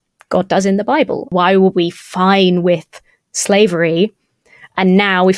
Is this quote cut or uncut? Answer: cut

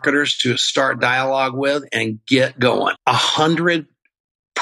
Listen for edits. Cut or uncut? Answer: cut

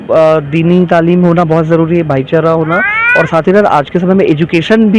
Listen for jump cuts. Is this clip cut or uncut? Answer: uncut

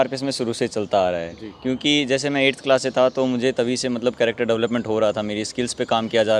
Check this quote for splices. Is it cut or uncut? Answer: uncut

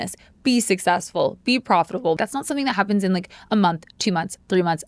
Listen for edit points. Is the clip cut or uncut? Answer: cut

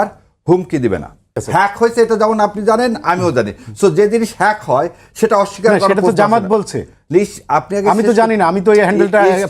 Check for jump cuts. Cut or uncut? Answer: cut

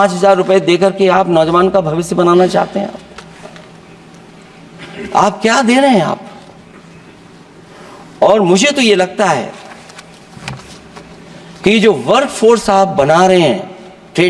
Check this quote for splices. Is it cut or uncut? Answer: uncut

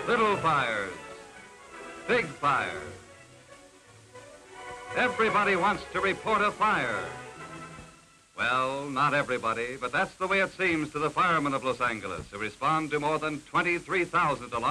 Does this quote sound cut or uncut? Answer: cut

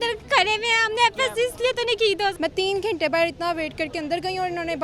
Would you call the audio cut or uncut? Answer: cut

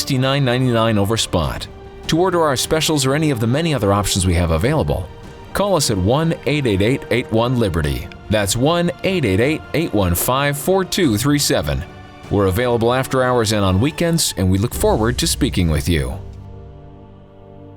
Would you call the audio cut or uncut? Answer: cut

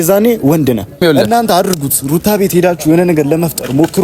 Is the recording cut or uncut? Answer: cut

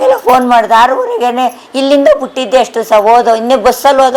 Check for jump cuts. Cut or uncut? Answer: uncut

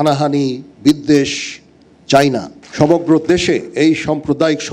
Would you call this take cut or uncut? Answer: cut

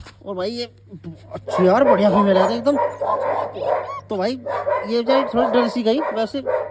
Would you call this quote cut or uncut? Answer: uncut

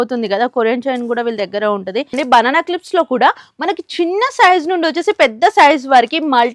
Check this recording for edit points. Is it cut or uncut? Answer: cut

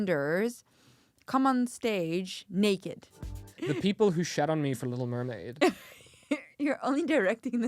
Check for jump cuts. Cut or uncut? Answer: cut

